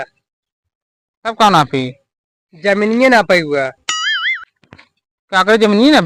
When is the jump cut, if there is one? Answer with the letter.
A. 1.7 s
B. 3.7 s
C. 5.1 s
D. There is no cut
D